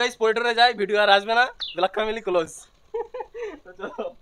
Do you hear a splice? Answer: no; 0 cuts

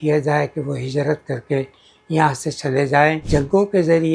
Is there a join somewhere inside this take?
yes; 1 cut; at 3.2 s

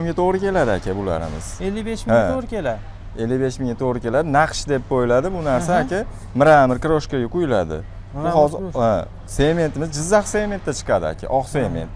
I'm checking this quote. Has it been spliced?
no; 0 cuts

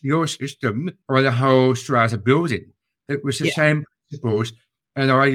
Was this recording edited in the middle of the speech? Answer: no; 0 cuts

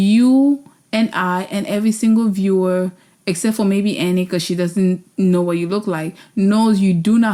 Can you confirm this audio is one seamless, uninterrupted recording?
yes; 0 cuts

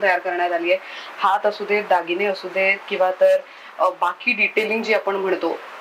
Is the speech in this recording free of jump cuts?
yes; 0 cuts

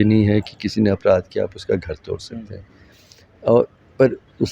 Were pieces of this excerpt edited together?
no; 0 cuts

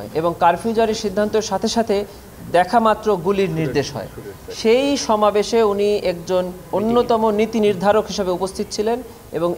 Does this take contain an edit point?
no; 0 cuts

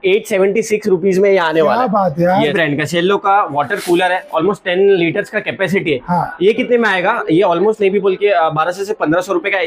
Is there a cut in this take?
no; 0 cuts

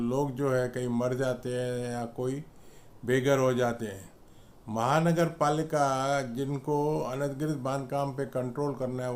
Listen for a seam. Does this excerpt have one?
no; 0 cuts

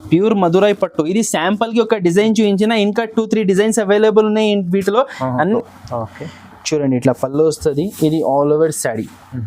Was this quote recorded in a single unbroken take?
no; 1 cut; at 5.3 s

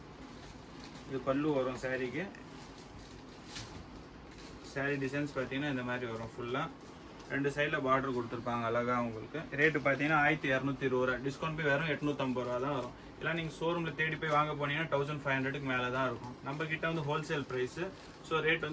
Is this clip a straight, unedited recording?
yes; 0 cuts

